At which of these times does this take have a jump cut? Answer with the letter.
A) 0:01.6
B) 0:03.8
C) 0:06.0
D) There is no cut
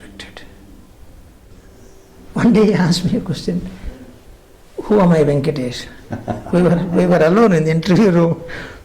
A